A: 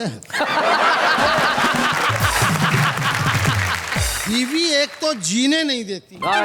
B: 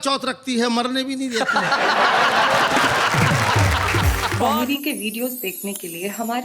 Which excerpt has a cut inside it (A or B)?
B